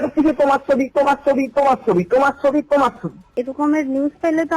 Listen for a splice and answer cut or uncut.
cut